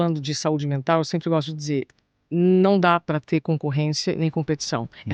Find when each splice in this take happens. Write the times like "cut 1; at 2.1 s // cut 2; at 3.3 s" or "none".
none